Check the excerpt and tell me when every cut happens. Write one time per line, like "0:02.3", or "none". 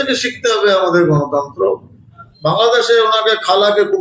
0:02.3

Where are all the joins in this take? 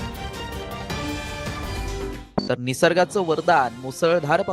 0:02.2

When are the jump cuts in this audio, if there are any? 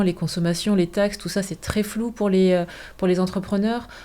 none

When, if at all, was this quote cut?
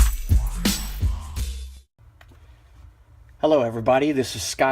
0:02.3

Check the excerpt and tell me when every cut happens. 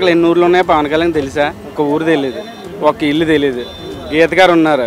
0:01.7

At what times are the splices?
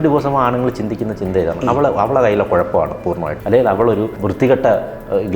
0:03.3
0:04.2

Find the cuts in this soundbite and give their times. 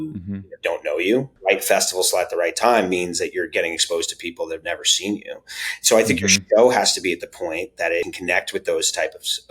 0:01.3
0:08.1

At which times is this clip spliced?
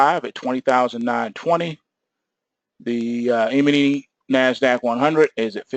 none

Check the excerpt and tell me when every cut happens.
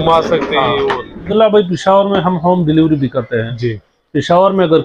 0:01.3

